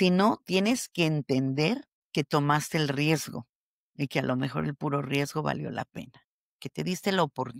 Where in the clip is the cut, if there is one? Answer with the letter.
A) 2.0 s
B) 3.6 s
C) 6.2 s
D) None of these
A